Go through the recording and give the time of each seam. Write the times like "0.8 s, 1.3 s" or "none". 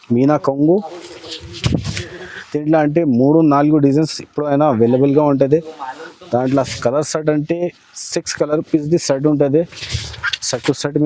none